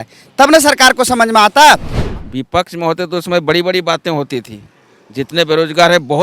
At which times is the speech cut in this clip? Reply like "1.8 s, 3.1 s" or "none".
2.0 s